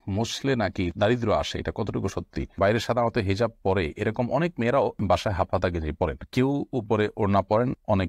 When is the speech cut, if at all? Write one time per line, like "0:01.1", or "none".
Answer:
0:02.5